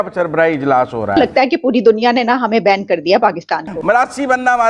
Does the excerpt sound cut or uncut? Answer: cut